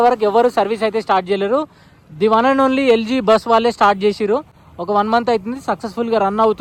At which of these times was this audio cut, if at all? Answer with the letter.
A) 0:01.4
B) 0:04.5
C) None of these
C